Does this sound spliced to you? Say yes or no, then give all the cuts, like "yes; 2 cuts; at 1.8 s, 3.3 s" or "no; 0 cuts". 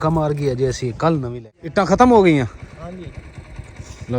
yes; 1 cut; at 1.3 s